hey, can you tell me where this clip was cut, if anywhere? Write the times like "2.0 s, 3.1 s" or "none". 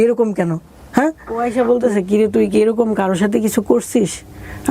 1.4 s